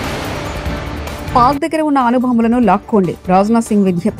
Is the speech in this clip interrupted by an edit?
yes; 1 cut; at 1.3 s

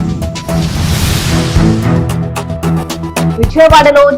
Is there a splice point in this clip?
yes; 1 cut; at 3.1 s

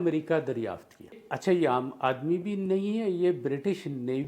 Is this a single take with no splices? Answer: no; 1 cut; at 1.2 s

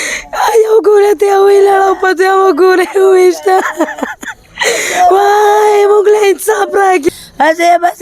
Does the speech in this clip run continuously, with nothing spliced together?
no; 1 cut; at 7.1 s

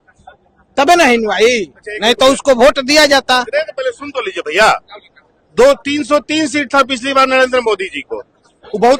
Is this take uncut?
yes; 0 cuts

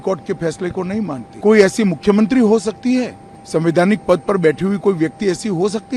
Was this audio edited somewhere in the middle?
yes; 1 cut; at 1.2 s

